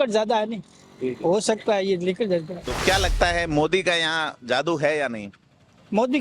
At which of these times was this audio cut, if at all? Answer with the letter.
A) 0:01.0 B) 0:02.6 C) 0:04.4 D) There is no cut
B